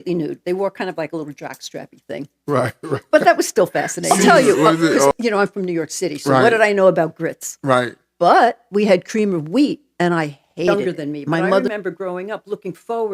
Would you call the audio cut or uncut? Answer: cut